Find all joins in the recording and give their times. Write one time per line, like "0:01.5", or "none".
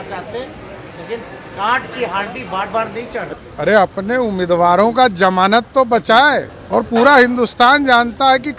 0:06.6